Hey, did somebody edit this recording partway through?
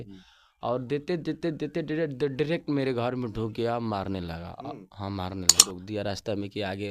yes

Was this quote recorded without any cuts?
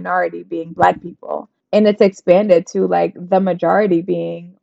no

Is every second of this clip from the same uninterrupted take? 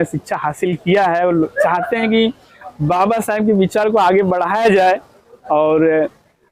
yes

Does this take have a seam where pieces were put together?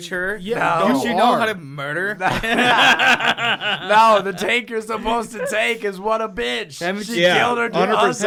no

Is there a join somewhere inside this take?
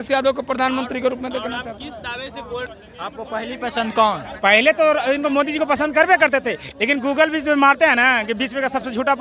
yes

